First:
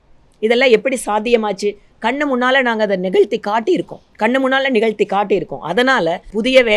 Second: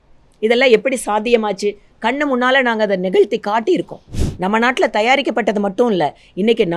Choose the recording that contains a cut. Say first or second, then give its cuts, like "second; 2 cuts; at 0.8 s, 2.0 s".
second; 1 cut; at 4.0 s